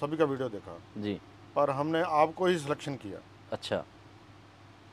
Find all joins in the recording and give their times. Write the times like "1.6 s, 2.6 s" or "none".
none